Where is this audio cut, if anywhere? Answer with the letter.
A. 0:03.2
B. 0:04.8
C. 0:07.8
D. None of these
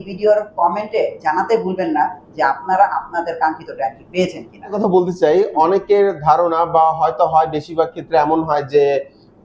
D